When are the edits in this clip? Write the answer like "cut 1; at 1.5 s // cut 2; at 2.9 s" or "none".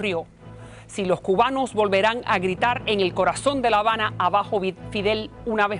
cut 1; at 2.3 s